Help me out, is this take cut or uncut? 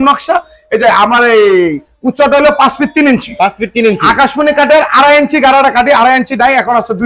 uncut